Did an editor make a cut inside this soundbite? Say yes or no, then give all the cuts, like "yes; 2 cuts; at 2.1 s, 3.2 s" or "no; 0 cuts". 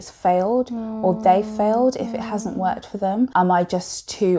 yes; 1 cut; at 3.3 s